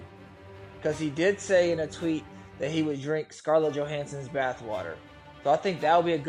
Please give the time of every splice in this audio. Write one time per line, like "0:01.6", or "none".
none